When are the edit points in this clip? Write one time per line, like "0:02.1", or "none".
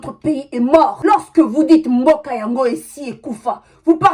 none

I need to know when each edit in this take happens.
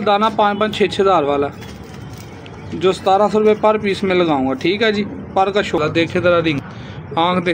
0:05.8
0:06.6

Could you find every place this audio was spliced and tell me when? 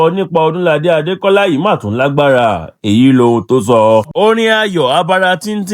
0:04.1

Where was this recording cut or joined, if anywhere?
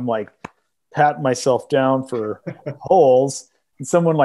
none

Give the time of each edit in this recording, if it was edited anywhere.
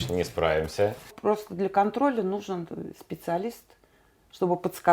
0:01.1

